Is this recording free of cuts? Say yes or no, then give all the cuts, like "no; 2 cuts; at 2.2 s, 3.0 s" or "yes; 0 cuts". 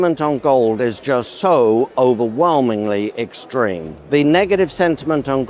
no; 2 cuts; at 1.3 s, 3.9 s